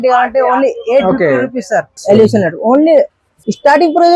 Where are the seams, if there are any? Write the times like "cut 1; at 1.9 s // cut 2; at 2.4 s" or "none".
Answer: cut 1; at 2.0 s